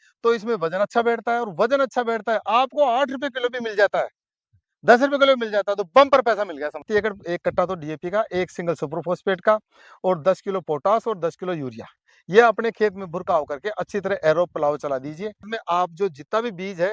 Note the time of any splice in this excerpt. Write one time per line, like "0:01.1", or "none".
0:06.9
0:15.5